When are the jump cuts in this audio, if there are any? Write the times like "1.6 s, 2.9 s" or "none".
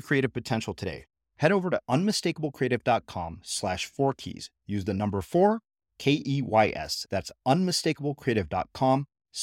none